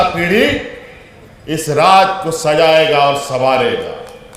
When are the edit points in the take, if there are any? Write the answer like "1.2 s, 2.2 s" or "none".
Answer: none